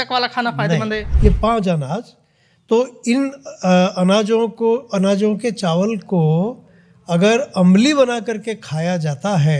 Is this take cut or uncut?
cut